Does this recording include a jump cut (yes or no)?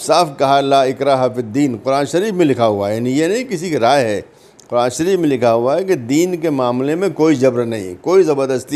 no